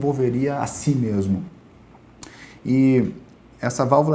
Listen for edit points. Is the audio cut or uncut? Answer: uncut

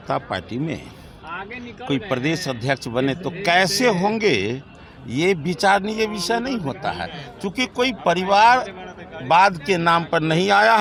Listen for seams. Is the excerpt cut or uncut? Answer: uncut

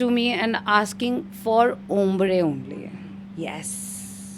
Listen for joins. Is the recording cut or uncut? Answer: uncut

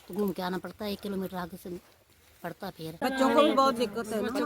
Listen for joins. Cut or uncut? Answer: cut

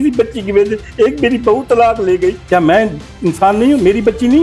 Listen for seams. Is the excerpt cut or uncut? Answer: cut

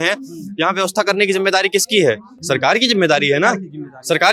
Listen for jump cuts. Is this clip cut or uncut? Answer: uncut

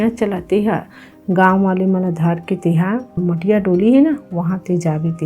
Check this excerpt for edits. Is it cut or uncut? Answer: cut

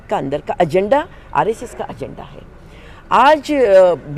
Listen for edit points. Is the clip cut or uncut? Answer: uncut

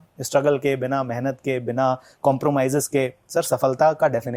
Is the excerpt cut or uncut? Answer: uncut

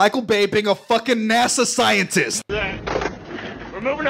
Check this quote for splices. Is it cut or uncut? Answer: cut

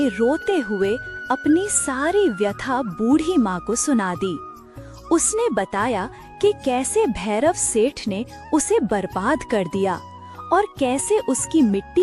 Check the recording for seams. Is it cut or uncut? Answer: uncut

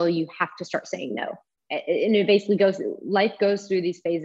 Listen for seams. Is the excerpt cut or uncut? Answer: cut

